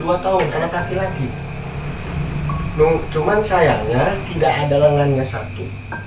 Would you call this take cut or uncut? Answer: cut